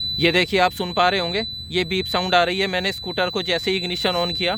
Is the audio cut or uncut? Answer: uncut